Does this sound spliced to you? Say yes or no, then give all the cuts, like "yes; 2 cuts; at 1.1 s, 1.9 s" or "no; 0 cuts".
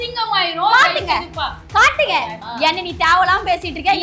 no; 0 cuts